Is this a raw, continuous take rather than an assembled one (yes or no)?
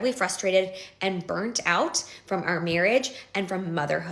yes